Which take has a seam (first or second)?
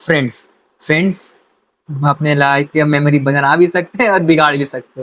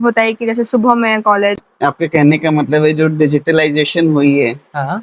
second